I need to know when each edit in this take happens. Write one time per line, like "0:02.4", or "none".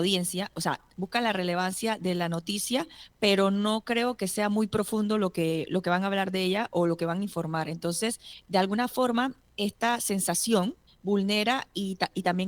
0:03.0
0:08.3
0:10.9